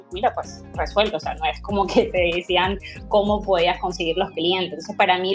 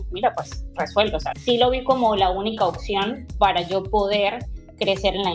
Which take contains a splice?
second; 1 cut; at 1.3 s

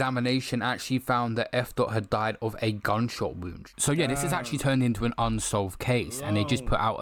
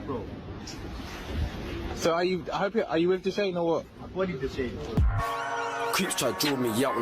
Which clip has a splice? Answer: second; 1 cut; at 4.9 s

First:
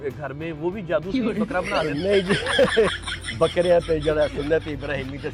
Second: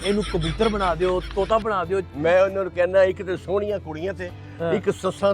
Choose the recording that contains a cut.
second; 1 cut; at 2.0 s

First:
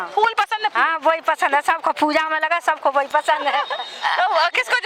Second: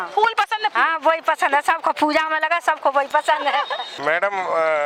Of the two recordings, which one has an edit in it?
second; 1 cut; at 3.8 s

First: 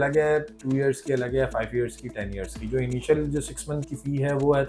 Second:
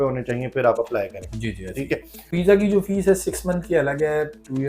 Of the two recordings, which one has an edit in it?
second; 1 cut; at 2.3 s

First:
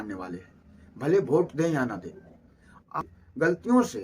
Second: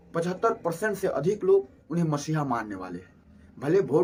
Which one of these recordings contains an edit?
first; 1 cut; at 3.1 s

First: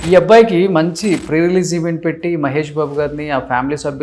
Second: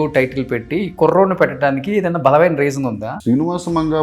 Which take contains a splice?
second; 1 cut; at 3.1 s

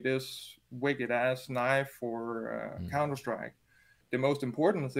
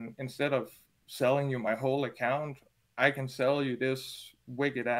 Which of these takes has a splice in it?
first; 1 cut; at 4.0 s

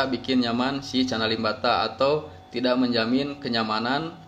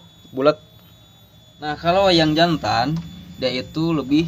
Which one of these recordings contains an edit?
second; 1 cut; at 1.8 s

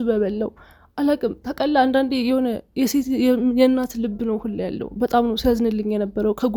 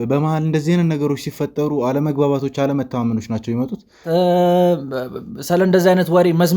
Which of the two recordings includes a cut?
second; 1 cut; at 4.1 s

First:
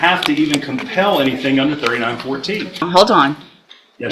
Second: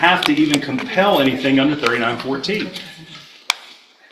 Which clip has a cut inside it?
first; 1 cut; at 2.9 s

